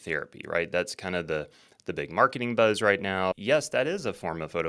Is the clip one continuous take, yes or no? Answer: no